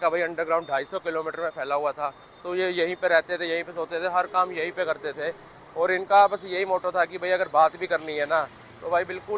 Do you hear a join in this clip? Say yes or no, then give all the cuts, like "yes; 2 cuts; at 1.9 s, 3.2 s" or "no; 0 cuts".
no; 0 cuts